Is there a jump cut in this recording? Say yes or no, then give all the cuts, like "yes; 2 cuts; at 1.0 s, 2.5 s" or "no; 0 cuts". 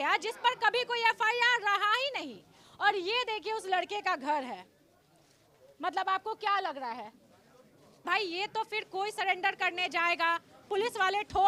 no; 0 cuts